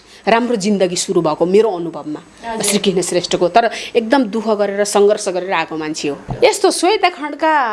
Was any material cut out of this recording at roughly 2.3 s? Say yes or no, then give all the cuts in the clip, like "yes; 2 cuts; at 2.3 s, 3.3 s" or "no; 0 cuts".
no; 1 cut; at 6.2 s